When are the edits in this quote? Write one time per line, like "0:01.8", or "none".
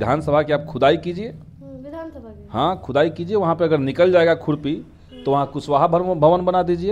none